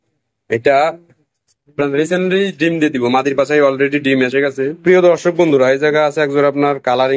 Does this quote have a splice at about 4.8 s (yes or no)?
yes